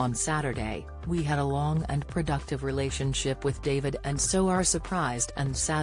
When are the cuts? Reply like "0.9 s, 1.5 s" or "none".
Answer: none